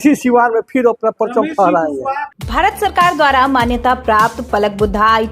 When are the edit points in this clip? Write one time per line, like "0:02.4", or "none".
none